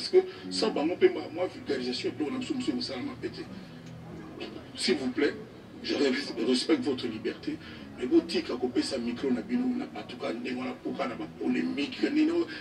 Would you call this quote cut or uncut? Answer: uncut